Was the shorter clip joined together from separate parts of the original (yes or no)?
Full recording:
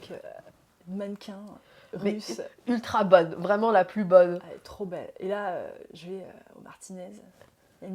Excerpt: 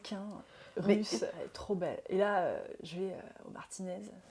yes